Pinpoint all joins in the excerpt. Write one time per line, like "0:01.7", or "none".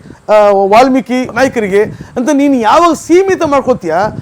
0:01.3